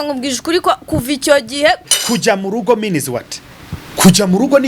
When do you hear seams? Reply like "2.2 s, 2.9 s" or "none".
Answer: 1.9 s